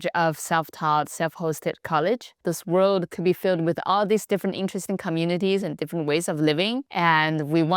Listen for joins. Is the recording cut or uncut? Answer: cut